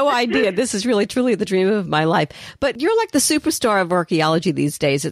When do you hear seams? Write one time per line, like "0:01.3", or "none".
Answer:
0:02.8